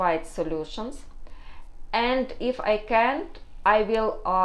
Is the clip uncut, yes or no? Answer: yes